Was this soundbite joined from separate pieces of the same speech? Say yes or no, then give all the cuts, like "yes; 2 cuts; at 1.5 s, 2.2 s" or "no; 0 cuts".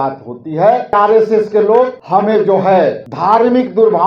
yes; 3 cuts; at 0.9 s, 2.0 s, 3.1 s